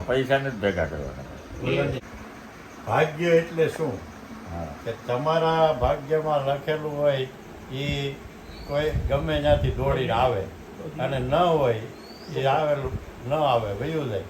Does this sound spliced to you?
yes; 1 cut; at 2.0 s

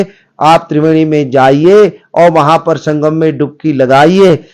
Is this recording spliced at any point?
no; 0 cuts

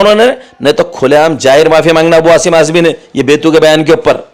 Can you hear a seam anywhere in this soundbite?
no; 0 cuts

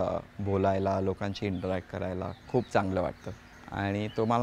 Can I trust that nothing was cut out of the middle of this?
no; 1 cut; at 2.4 s

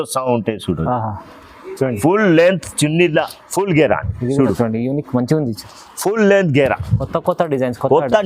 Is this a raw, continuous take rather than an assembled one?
no; 1 cut; at 3.2 s

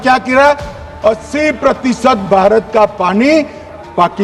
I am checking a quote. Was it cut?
no; 0 cuts

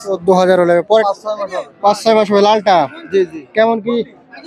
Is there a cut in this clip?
yes; 1 cut; at 1.1 s

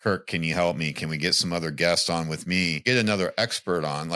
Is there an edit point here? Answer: yes; 1 cut; at 2.8 s

